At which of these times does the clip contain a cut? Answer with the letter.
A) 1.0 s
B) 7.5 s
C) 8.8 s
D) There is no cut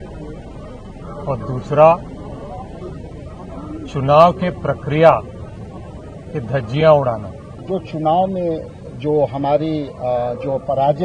B